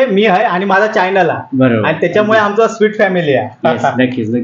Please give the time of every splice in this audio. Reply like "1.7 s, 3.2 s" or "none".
none